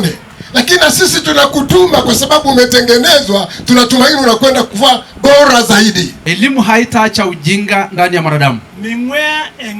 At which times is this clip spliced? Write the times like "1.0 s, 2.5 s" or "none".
6.2 s

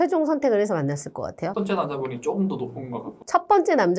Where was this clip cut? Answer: 1.6 s

